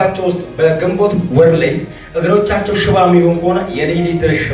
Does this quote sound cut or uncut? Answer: cut